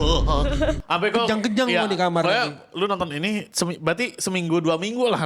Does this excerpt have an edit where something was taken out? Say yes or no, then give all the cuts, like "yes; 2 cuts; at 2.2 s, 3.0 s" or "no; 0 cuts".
yes; 1 cut; at 3.5 s